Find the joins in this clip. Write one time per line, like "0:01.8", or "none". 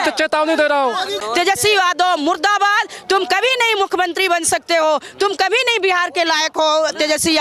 0:01.2